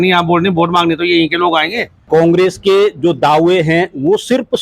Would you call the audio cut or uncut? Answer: cut